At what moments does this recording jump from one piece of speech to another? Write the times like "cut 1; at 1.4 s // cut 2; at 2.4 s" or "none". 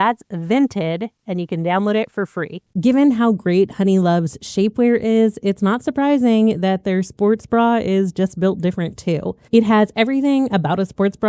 cut 1; at 2.8 s // cut 2; at 9.4 s